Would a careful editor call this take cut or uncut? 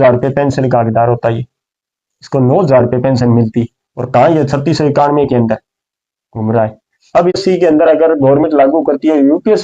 cut